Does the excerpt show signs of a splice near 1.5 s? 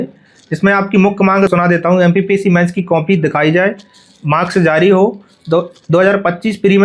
yes; 1 cut; at 1.5 s

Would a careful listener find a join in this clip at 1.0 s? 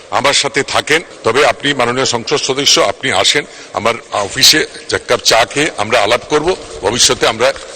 yes; 1 cut; at 1.0 s

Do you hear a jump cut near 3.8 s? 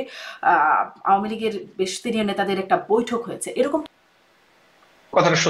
yes; 1 cut; at 3.8 s

